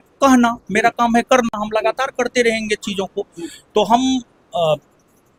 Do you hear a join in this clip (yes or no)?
no